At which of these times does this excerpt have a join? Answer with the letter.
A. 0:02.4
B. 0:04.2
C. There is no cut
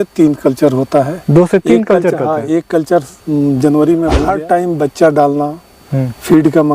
B